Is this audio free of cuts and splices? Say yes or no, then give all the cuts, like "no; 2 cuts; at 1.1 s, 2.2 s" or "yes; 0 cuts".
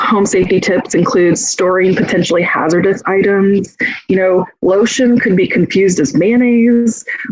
yes; 0 cuts